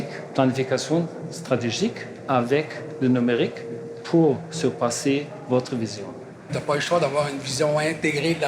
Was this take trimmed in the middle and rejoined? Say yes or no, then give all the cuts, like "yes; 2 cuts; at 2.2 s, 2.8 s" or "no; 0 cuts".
yes; 1 cut; at 6.5 s